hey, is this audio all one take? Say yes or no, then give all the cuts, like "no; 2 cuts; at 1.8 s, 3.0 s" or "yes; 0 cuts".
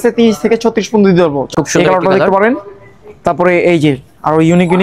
no; 1 cut; at 1.5 s